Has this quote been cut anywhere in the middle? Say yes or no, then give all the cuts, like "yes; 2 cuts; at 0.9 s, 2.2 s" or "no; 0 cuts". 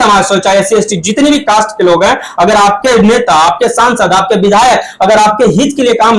no; 0 cuts